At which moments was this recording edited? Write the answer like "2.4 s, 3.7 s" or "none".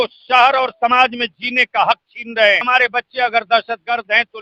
2.6 s

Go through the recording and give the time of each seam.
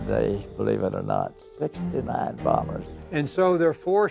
3.0 s

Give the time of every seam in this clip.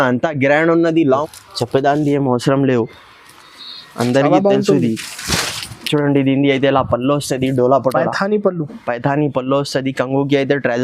1.3 s

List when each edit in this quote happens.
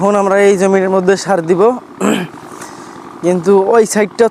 none

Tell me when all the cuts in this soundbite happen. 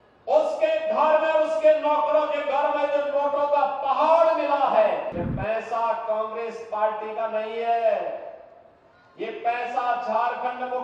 5.2 s

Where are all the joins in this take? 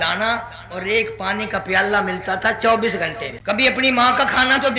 3.3 s

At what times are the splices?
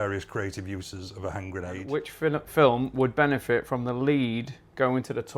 1.9 s

